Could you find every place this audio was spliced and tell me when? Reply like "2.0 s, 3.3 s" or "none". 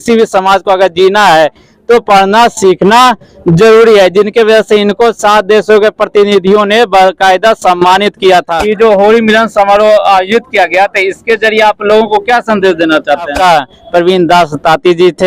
8.6 s, 13.3 s